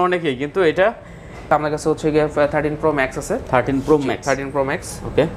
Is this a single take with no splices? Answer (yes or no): no